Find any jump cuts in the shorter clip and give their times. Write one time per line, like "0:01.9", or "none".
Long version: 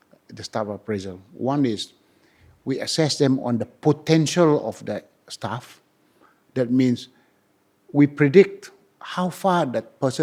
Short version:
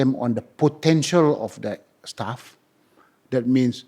none